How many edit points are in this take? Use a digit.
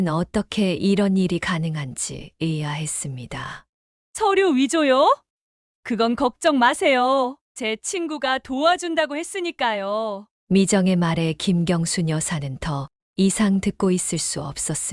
0